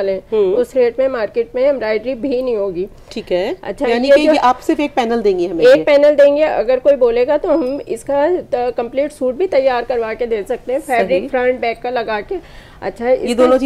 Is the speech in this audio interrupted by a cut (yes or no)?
no